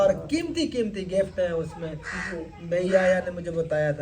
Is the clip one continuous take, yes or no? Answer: yes